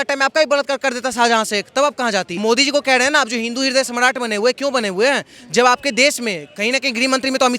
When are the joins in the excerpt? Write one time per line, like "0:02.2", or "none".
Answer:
0:02.3